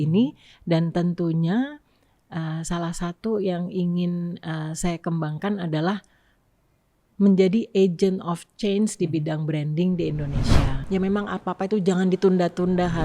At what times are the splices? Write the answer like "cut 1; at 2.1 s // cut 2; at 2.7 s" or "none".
cut 1; at 10.8 s